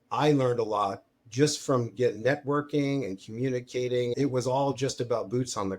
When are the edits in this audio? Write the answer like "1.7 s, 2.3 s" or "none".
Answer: 4.1 s